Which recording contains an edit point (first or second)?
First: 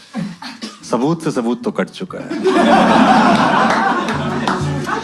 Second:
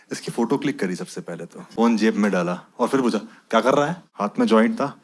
second